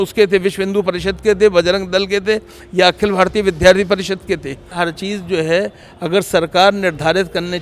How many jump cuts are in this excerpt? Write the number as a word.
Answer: one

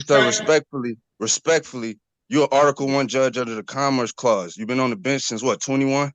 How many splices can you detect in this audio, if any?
zero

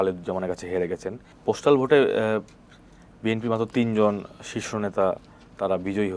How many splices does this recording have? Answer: one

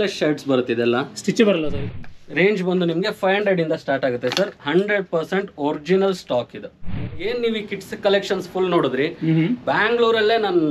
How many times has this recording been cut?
two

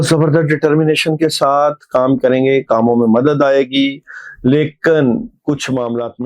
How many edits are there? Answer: zero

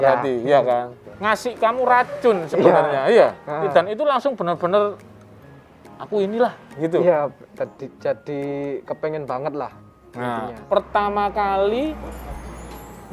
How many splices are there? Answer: two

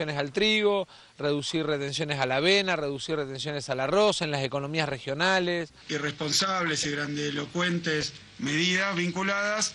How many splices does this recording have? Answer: one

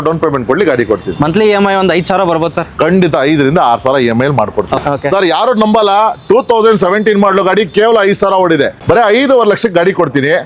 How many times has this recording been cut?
two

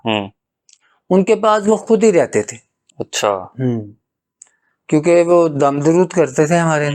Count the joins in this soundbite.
zero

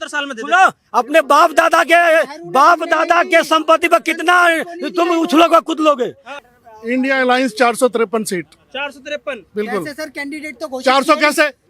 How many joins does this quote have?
one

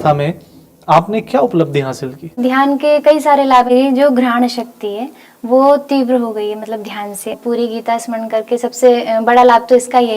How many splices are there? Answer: three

